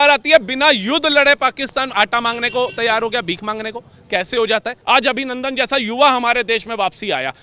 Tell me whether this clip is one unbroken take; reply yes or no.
no